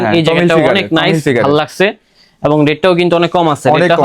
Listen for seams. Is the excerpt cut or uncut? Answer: uncut